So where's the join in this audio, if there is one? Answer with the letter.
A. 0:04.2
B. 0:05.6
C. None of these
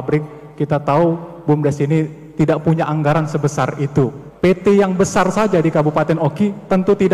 A